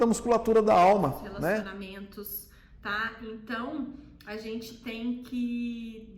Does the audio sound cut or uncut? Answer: cut